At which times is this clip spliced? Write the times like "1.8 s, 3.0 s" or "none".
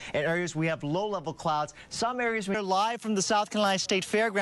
2.6 s